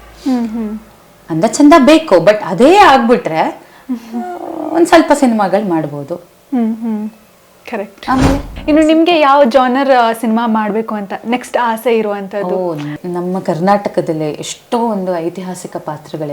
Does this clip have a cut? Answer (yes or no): yes